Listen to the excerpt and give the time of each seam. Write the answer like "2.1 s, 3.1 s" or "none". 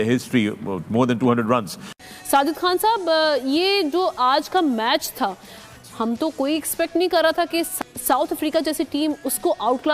1.8 s, 7.8 s